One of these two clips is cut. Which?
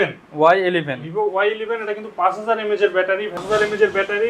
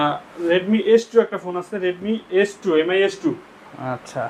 first; 1 cut; at 3.4 s

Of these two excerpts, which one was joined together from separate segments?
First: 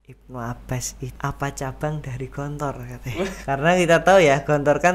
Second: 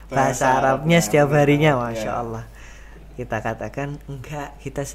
first; 2 cuts; at 1.0 s, 3.4 s

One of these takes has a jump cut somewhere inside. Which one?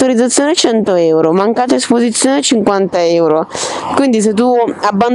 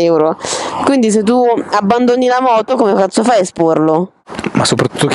second; 1 cut; at 4.2 s

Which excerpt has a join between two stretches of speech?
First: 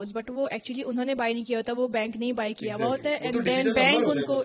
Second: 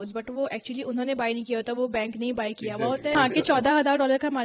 second; 1 cut; at 3.1 s

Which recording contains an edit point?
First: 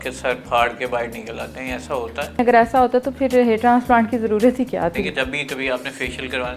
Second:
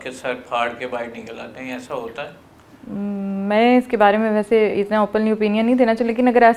first; 2 cuts; at 2.4 s, 4.9 s

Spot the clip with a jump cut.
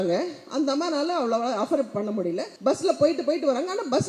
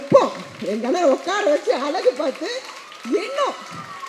first; 1 cut; at 2.5 s

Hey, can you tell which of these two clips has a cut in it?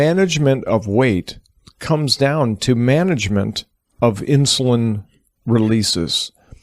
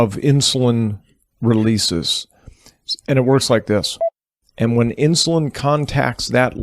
second; 1 cut; at 4.0 s

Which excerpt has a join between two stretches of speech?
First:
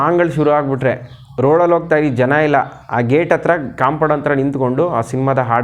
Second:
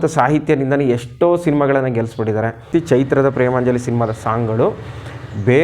second; 1 cut; at 2.7 s

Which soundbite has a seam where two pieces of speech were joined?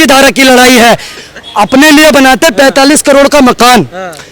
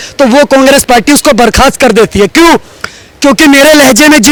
first; 1 cut; at 1.1 s

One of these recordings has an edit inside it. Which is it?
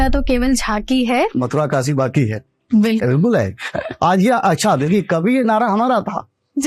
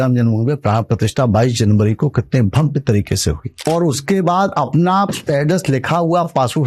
second; 2 cuts; at 3.5 s, 5.2 s

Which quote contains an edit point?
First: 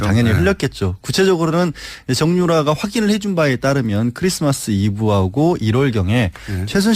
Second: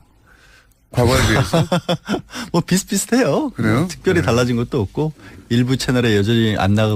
first; 1 cut; at 4.8 s

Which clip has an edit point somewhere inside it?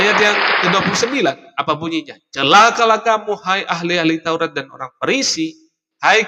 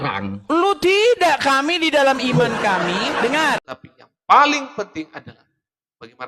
second; 1 cut; at 3.7 s

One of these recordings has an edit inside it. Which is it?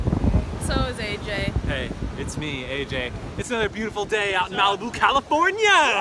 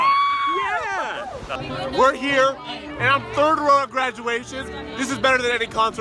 second; 1 cut; at 1.6 s

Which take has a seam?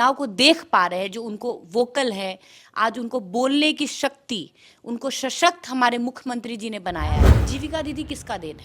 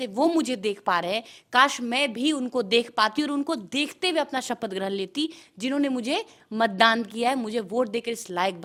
first; 1 cut; at 7.3 s

